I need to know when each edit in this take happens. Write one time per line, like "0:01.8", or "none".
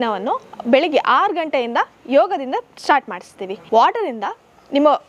0:03.7

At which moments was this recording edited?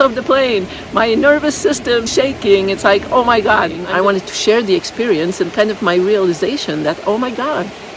0:02.0
0:03.8

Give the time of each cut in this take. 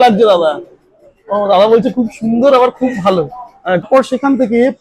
0:03.9

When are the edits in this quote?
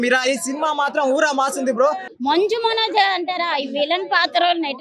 0:02.1

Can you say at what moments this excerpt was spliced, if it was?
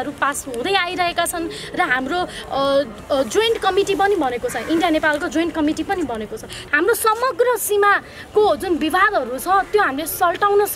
0:06.5

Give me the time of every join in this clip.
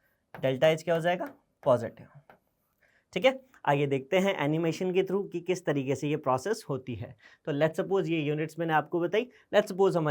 none

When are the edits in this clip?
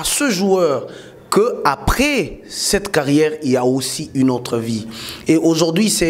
none

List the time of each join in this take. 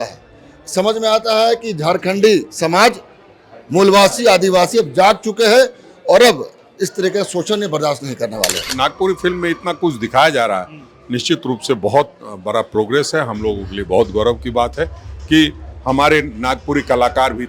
0:08.7

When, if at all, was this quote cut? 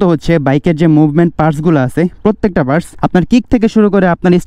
0:02.9

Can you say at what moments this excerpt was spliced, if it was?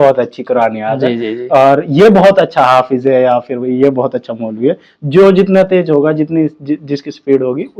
none

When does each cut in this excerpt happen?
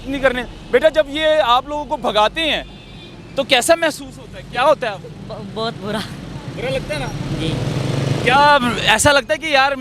none

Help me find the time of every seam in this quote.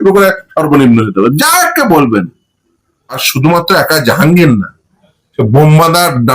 0:03.3

